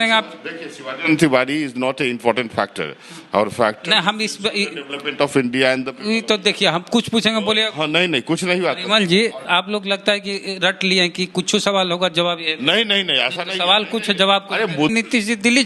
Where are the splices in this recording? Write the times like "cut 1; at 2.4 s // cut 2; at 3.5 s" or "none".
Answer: cut 1; at 9.5 s // cut 2; at 14.9 s